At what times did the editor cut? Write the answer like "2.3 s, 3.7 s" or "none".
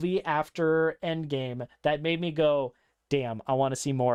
none